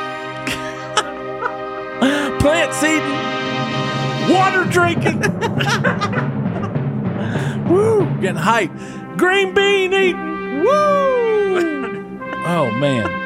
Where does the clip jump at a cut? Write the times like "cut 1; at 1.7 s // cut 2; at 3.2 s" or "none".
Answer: none